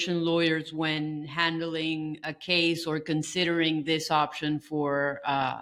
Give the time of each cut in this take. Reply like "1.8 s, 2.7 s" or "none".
none